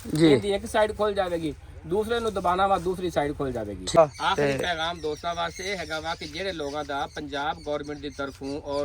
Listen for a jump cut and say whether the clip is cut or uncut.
cut